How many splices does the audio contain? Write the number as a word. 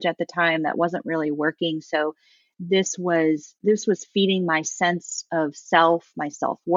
zero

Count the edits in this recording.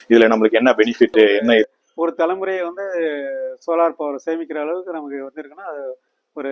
one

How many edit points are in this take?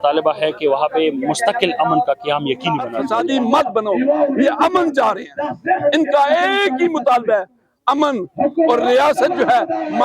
one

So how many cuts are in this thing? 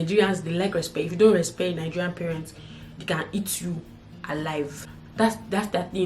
one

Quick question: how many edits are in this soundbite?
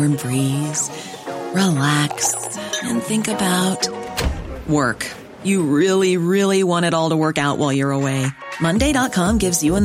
zero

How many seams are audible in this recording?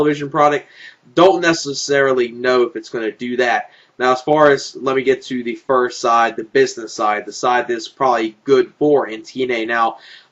one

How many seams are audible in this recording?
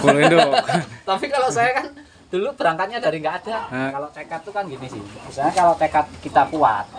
one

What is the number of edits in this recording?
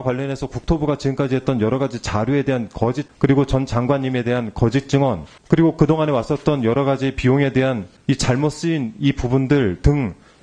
three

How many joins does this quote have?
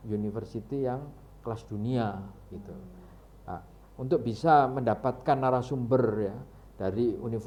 zero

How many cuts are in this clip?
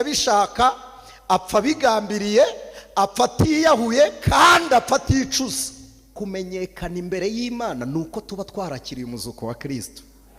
one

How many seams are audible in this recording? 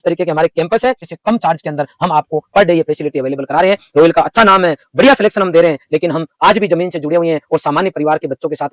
one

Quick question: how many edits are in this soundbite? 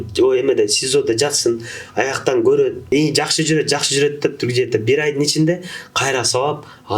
one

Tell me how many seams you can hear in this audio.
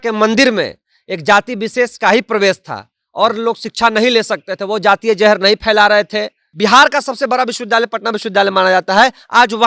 one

